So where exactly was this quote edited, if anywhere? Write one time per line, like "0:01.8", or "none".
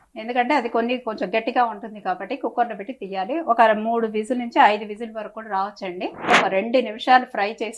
0:06.3